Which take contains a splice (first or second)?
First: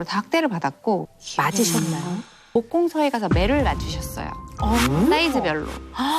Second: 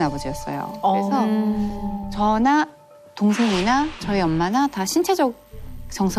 first